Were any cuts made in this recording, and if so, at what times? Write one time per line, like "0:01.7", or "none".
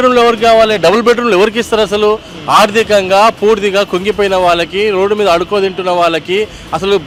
none